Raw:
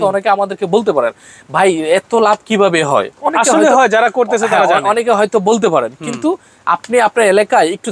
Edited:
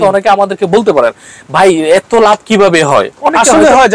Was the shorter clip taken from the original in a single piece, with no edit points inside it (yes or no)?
yes